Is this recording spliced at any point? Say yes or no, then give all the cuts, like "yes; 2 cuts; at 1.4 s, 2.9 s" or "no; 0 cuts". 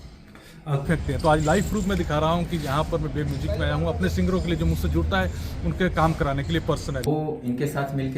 yes; 2 cuts; at 0.9 s, 7.1 s